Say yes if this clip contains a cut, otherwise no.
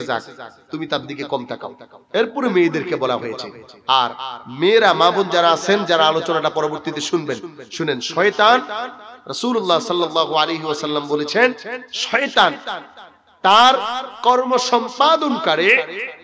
no